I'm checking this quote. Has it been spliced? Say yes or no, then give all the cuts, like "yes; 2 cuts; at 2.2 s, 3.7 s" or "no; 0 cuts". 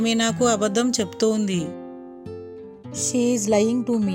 no; 0 cuts